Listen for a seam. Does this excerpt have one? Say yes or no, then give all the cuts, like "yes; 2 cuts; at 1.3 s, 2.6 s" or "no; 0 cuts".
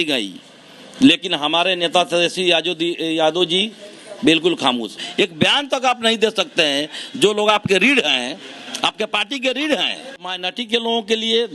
yes; 2 cuts; at 4.9 s, 10.5 s